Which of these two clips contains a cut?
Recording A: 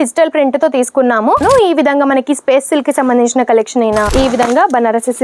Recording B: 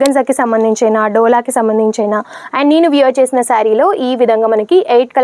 A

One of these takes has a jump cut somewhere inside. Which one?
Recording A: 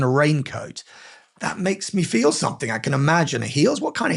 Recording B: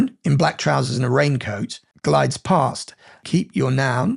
B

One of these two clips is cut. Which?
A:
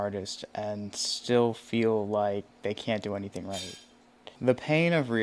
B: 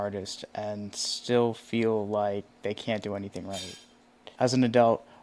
A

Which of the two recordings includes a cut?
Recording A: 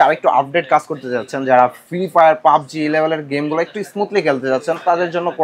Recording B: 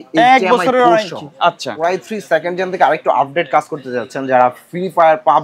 B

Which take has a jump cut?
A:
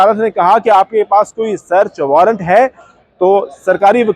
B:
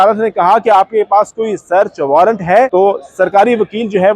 B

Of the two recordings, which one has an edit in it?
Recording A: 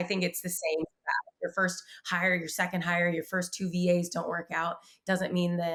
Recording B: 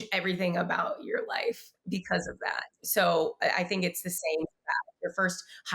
B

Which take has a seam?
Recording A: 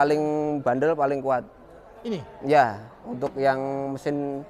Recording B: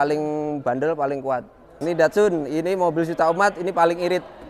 B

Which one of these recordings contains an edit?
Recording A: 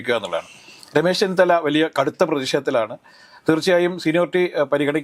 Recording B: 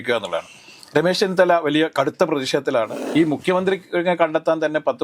B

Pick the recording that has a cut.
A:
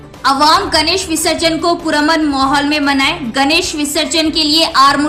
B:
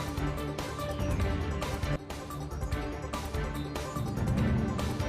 B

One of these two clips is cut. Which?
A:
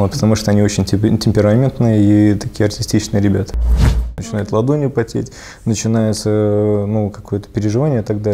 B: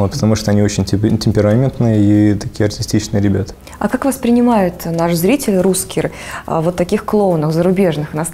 A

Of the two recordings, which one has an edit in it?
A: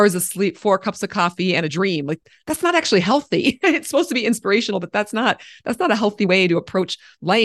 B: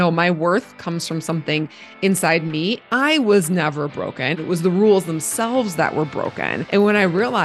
B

